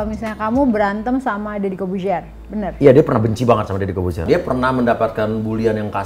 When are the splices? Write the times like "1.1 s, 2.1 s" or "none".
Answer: 4.2 s